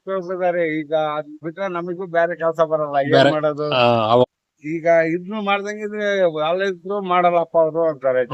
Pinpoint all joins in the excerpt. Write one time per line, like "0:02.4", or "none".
0:04.2